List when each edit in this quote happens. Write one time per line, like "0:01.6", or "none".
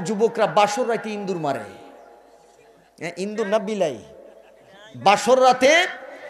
none